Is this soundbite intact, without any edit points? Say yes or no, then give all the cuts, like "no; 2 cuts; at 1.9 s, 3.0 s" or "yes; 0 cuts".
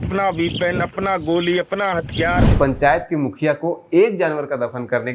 no; 1 cut; at 2.5 s